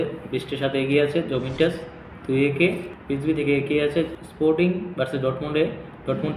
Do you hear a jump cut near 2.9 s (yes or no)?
yes